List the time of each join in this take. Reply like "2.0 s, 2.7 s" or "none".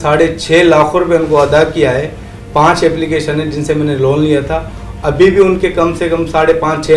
none